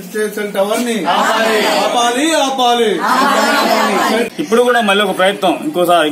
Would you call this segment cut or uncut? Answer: cut